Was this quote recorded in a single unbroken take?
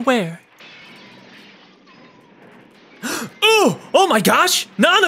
yes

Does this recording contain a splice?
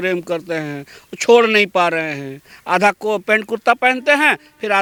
no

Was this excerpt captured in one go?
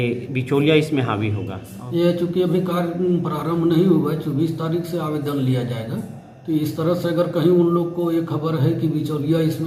yes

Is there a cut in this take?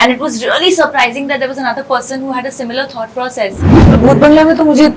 yes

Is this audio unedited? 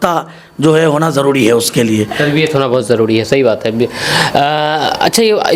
yes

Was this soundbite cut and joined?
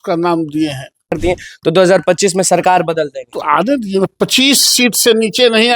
yes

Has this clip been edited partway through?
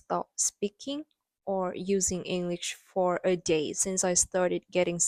no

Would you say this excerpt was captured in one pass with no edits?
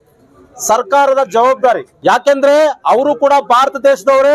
no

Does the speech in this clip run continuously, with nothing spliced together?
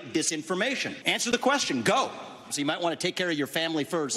no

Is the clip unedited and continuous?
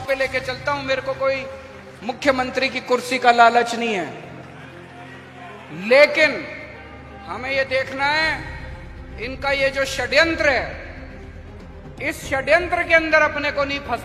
yes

